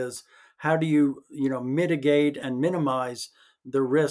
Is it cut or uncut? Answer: cut